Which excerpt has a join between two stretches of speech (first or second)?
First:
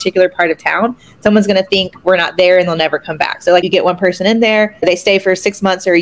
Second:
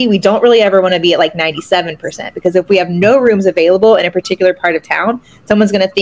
first